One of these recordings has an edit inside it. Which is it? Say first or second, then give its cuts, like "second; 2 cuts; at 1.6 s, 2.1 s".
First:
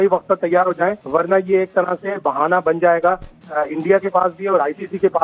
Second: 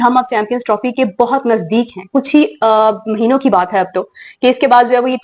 first; 1 cut; at 1.0 s